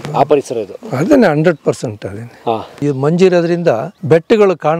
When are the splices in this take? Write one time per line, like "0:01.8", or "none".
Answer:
0:02.8
0:03.9